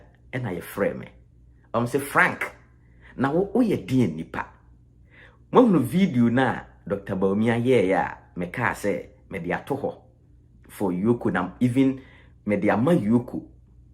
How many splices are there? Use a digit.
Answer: 0